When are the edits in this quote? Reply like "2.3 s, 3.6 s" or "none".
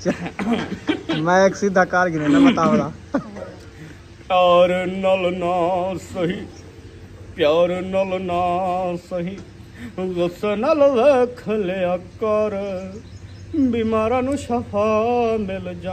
none

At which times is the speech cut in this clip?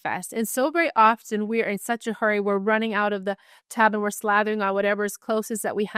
none

